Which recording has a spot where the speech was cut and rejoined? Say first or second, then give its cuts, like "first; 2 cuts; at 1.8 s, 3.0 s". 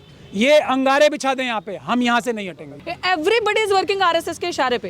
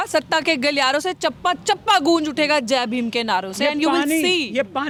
first; 1 cut; at 2.6 s